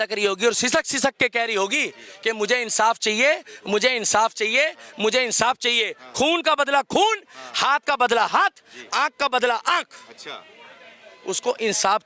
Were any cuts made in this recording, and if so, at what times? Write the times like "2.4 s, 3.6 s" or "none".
none